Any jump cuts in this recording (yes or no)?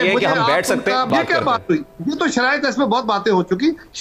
yes